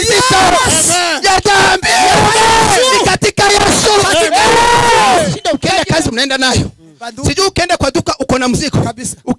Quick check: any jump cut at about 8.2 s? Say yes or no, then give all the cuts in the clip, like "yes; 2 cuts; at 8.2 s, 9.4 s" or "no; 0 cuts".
no; 1 cut; at 5.4 s